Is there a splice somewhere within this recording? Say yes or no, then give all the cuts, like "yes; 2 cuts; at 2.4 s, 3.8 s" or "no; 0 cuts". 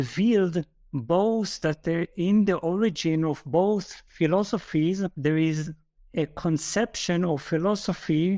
no; 0 cuts